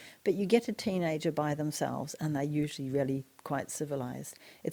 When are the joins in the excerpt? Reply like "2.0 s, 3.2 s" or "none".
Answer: none